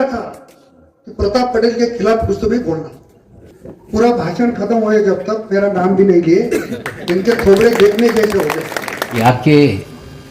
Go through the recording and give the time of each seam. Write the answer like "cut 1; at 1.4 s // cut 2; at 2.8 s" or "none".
cut 1; at 9.2 s